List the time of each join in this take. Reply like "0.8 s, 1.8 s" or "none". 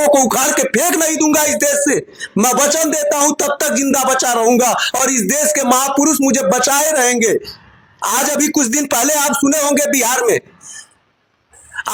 none